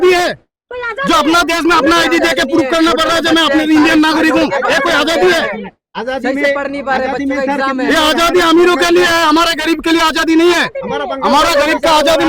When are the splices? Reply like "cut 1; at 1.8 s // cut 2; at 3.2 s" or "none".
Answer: none